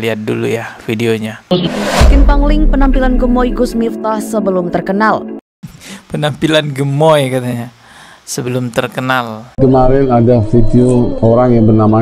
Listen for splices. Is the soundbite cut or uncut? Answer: cut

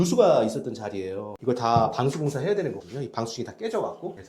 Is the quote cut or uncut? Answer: cut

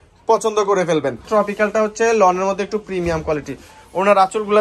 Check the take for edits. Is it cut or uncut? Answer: cut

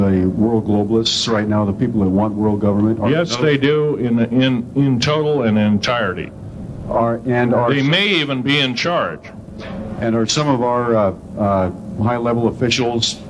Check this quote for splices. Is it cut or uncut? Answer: uncut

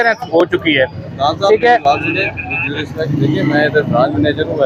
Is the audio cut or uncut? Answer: uncut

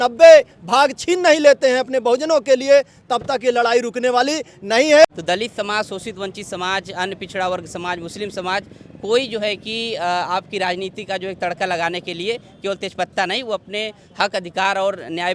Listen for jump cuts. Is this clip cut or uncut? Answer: cut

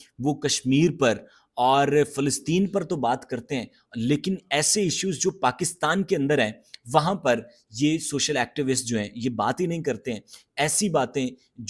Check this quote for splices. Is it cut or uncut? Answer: uncut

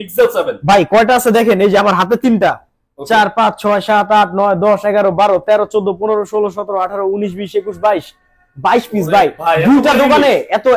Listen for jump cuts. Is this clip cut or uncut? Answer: uncut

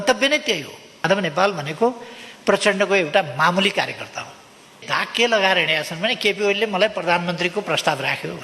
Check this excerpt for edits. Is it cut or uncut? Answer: cut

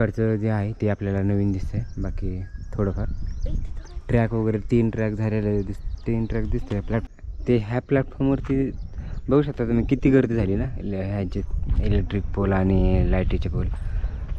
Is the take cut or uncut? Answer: cut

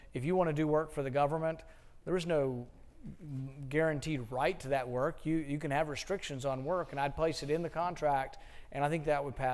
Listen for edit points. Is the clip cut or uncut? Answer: cut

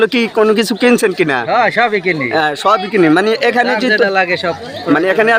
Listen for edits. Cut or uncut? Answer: uncut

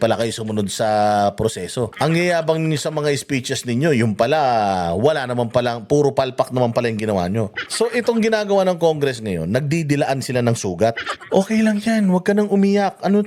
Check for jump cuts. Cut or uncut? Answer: cut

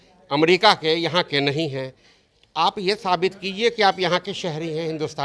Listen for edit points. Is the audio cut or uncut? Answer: uncut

